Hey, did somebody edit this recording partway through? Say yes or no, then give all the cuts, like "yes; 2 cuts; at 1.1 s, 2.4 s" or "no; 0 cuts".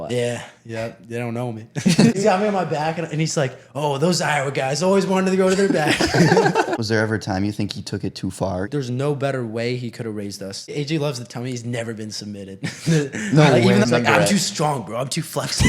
yes; 5 cuts; at 2.1 s, 6.7 s, 8.7 s, 10.7 s, 13.8 s